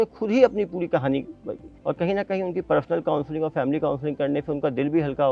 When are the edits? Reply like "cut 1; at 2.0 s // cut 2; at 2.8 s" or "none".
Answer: none